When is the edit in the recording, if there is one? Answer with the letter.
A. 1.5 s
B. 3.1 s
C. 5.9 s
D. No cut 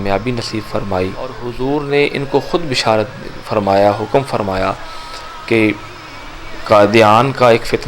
A